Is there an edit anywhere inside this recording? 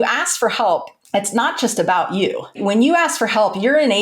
yes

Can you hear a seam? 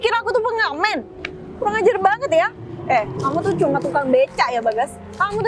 no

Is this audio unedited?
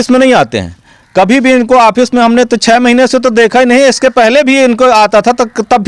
yes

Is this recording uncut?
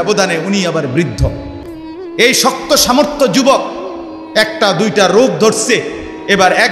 yes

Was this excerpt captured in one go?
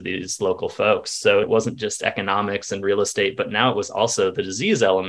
no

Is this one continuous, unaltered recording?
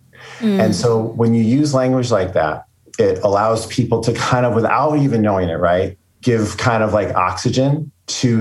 no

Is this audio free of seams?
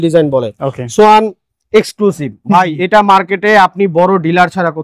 yes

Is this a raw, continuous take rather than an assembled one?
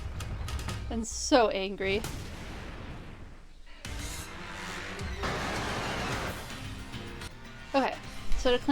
no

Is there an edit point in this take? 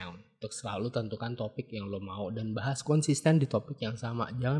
no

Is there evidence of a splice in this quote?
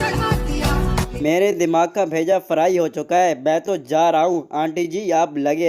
yes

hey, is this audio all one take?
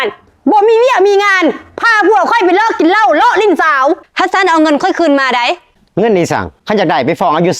no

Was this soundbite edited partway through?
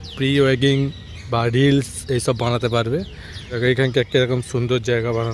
yes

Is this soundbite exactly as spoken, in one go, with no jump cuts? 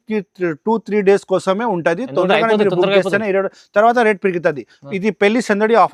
yes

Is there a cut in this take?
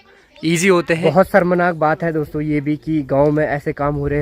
yes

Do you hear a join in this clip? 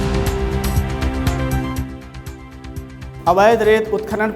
no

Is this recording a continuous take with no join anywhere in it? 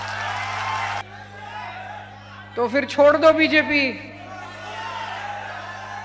no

